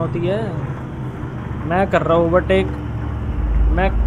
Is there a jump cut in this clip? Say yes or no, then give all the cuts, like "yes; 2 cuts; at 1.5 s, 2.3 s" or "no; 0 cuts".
no; 0 cuts